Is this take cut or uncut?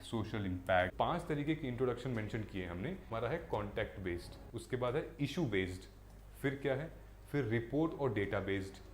cut